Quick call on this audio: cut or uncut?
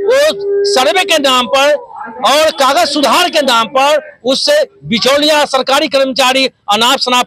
uncut